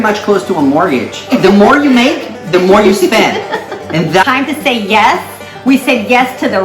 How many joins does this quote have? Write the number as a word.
two